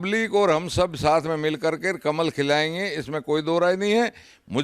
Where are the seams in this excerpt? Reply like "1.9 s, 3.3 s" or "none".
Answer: none

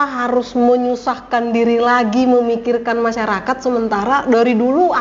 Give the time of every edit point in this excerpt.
none

